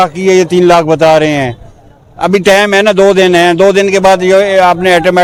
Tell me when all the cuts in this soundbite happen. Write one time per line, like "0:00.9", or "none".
none